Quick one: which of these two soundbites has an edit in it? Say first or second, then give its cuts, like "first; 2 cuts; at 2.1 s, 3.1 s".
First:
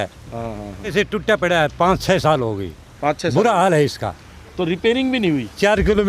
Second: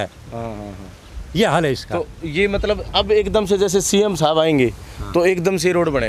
first; 1 cut; at 0.9 s